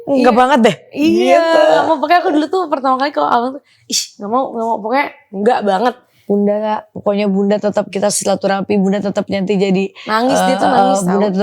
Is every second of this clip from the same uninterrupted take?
no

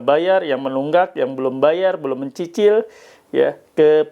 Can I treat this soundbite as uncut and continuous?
yes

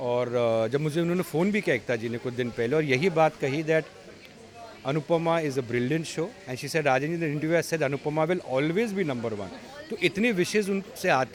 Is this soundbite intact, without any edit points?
yes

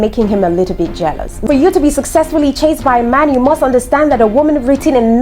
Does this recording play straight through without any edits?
no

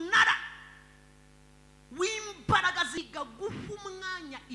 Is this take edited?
yes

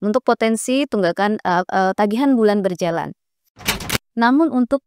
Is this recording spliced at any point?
yes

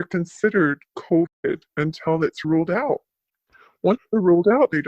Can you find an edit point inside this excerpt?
yes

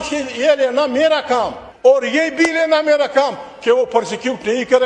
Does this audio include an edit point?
yes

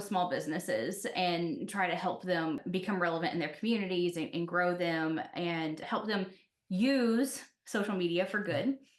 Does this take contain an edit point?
yes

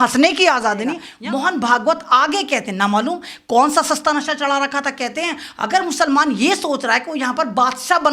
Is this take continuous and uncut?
no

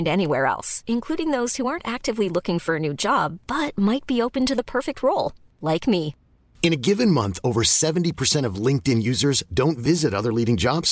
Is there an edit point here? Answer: no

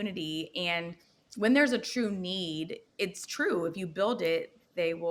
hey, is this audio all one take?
yes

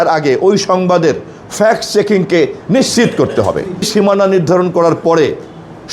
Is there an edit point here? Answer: yes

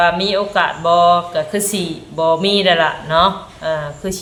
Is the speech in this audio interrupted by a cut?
no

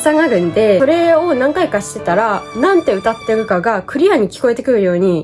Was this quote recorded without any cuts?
no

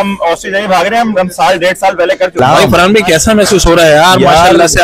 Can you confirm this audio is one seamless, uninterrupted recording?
no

